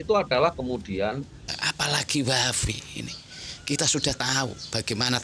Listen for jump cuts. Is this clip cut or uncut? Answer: cut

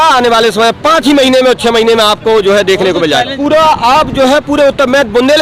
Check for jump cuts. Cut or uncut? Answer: cut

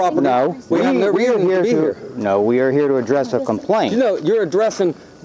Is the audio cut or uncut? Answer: cut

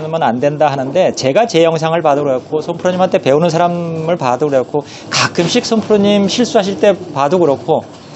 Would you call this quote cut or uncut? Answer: uncut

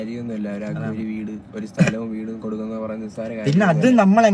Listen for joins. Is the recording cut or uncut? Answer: uncut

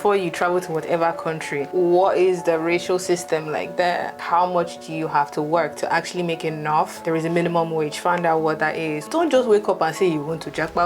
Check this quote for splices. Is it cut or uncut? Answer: cut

